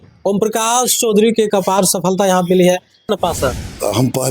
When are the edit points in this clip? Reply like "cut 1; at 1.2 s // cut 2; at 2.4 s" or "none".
cut 1; at 3.1 s